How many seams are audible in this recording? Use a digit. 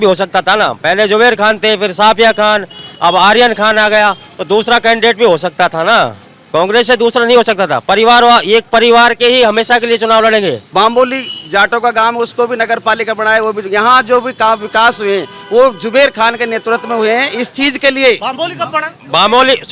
2